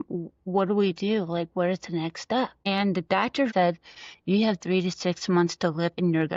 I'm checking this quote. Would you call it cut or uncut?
cut